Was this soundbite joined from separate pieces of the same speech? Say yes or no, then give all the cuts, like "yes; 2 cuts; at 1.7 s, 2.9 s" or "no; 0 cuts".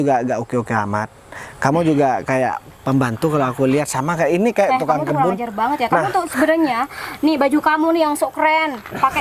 no; 0 cuts